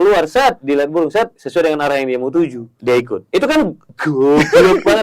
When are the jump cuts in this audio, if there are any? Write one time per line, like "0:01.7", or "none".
0:01.4
0:02.7
0:03.9